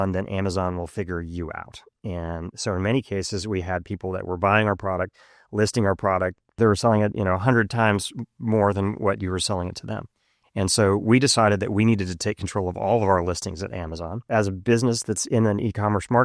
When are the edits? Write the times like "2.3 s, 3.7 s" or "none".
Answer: 6.5 s, 14.1 s

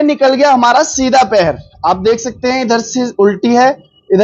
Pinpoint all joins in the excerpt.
none

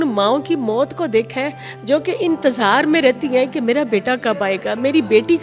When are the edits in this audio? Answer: none

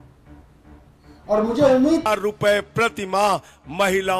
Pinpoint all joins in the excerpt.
2.1 s

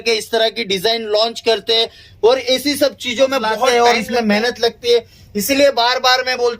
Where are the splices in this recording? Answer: 3.5 s

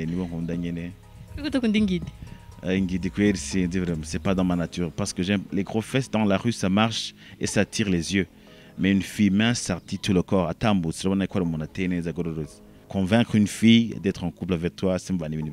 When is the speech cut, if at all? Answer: 12.9 s

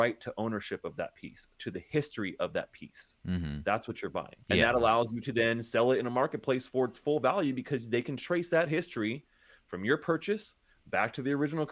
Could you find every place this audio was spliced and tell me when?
4.3 s

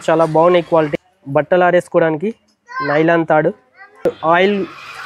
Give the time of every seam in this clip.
0.9 s

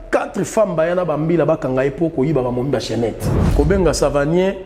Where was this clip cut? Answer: 3.3 s

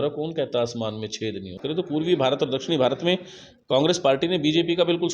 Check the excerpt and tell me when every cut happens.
1.7 s

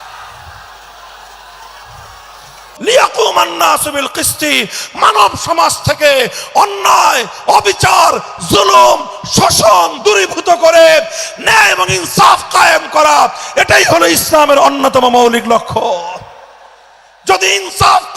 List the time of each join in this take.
2.6 s

